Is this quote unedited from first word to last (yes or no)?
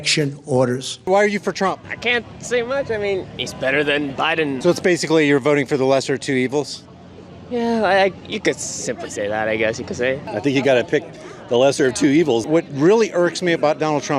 no